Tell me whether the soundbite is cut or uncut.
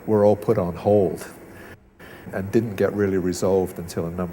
cut